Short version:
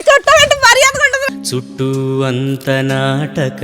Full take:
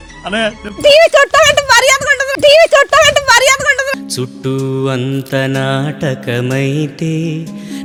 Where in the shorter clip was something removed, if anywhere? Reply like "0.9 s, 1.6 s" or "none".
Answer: 1.1 s